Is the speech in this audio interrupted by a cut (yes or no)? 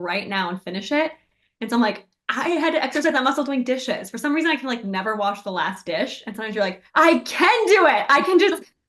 no